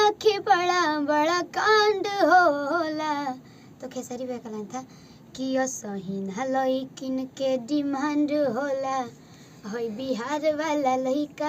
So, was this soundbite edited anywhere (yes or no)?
no